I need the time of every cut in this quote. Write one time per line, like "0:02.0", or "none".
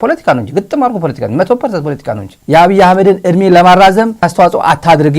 0:02.3
0:04.2